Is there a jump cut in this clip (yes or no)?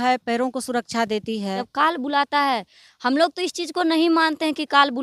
yes